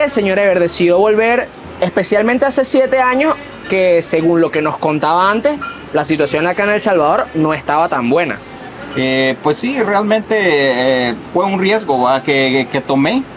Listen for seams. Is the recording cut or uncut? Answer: uncut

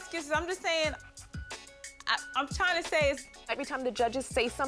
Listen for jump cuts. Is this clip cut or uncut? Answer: cut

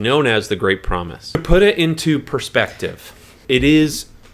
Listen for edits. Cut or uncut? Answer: cut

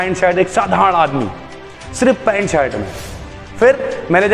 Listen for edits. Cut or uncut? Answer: uncut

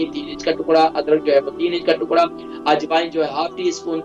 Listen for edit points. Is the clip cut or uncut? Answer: uncut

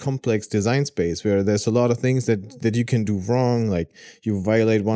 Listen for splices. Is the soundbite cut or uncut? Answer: uncut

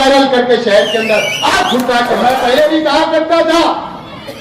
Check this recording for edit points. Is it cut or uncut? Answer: cut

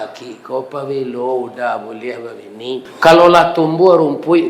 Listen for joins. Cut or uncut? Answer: cut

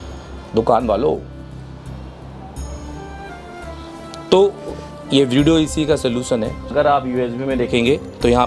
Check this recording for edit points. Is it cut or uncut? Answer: cut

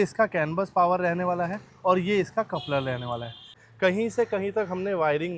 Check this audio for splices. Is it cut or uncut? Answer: cut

